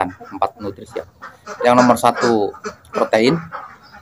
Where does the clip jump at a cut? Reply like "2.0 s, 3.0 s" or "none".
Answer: 1.2 s